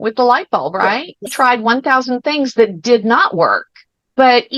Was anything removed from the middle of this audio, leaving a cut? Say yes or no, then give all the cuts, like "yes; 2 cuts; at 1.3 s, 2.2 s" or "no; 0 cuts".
yes; 1 cut; at 1.2 s